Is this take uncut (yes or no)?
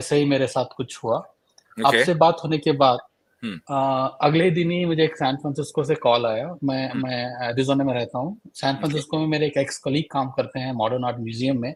yes